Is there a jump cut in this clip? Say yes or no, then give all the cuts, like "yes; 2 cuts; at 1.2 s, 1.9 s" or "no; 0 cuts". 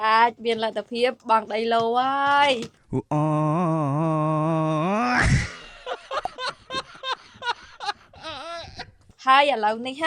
yes; 2 cuts; at 2.8 s, 9.1 s